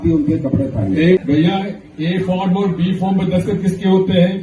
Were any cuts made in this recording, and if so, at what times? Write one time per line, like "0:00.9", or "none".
0:01.2